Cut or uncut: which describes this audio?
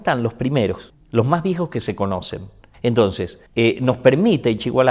cut